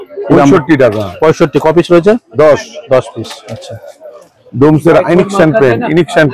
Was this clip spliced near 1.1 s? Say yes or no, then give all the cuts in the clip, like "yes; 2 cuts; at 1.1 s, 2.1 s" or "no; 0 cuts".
no; 0 cuts